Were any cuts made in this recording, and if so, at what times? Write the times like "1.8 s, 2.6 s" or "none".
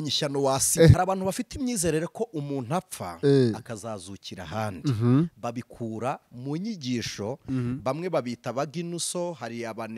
0.9 s